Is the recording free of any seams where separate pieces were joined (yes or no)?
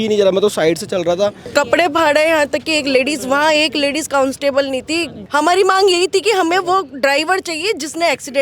no